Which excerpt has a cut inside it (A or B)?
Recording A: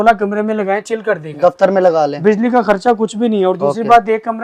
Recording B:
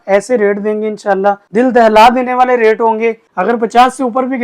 B